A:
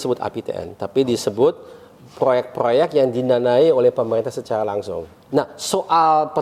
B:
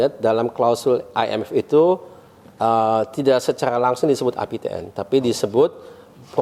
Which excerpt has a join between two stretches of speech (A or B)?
A